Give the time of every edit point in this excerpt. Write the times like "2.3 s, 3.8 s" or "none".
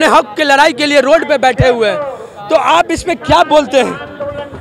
none